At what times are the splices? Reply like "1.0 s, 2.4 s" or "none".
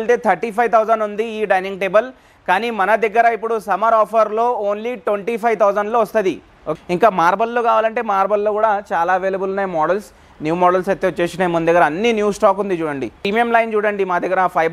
6.5 s, 13.3 s

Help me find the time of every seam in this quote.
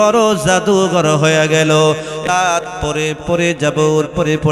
2.2 s

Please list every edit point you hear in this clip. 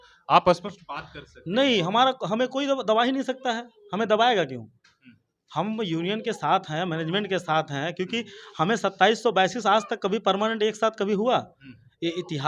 none

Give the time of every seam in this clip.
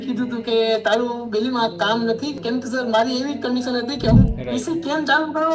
2.4 s, 4.3 s

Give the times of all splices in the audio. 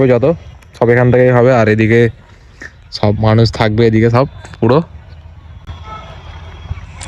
none

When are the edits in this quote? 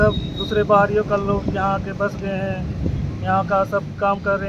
none

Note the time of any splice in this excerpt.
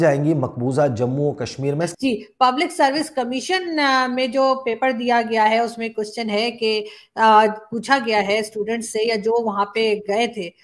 1.9 s

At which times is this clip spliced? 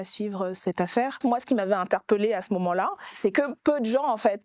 1.2 s, 3.0 s

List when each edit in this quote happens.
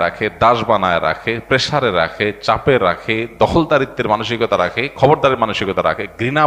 none

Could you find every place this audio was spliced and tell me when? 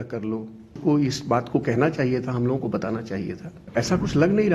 0.8 s, 3.6 s

